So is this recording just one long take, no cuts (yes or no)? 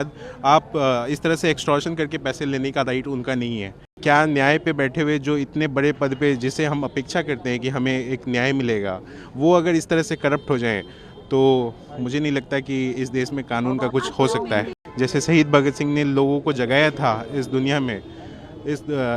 no